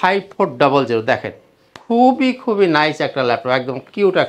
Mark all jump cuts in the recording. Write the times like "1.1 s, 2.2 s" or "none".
none